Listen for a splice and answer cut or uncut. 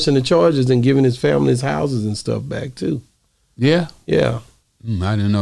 uncut